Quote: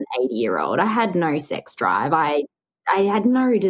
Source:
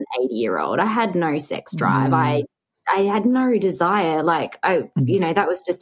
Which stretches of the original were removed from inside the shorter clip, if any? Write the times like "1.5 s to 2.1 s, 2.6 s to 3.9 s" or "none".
none